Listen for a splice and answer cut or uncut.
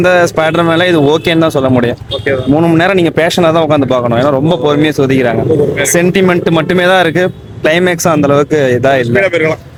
uncut